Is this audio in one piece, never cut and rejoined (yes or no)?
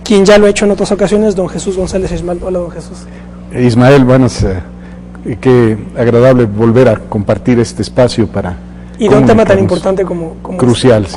no